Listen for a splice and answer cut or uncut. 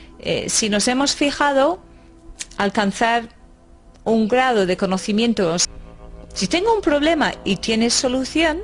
uncut